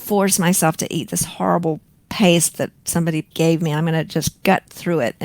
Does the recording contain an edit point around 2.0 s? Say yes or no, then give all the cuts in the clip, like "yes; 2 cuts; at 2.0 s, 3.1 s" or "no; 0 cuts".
no; 1 cut; at 3.3 s